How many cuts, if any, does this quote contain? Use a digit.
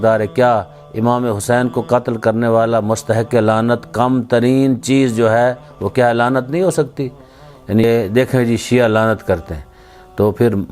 1